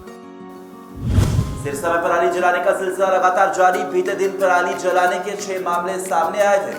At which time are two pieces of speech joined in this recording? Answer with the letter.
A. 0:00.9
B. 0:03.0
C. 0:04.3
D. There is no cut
D